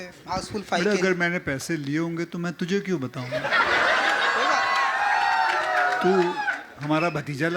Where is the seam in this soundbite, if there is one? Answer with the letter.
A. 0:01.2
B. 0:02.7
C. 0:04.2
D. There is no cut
D